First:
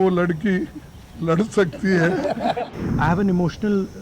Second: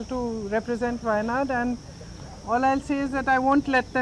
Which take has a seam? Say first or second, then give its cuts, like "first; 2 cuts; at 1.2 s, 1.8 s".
first; 1 cut; at 2.7 s